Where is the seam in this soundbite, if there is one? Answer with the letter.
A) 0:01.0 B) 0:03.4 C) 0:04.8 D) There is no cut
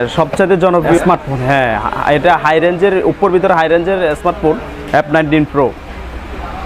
A